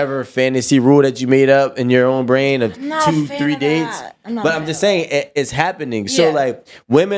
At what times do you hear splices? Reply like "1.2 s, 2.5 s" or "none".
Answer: none